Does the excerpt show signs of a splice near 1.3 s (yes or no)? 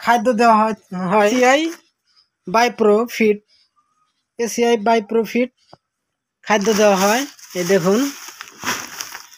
yes